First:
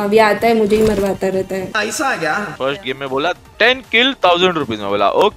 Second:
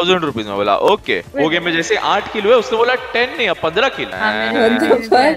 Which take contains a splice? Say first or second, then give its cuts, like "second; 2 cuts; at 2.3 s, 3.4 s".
first; 2 cuts; at 1.7 s, 2.5 s